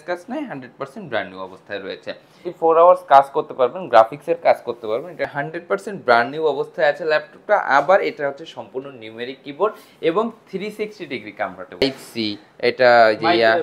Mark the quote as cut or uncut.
cut